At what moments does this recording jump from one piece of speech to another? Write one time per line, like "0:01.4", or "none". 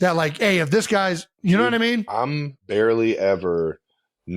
0:01.3
0:02.5